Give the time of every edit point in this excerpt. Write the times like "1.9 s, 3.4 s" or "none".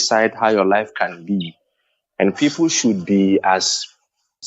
none